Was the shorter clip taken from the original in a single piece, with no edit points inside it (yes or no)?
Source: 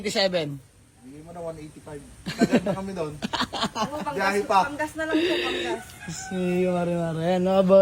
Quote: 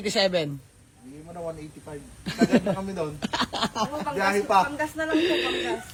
yes